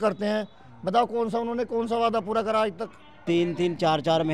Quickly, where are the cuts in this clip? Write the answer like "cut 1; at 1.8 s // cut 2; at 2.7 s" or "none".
cut 1; at 3.2 s